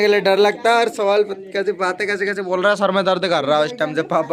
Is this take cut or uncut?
uncut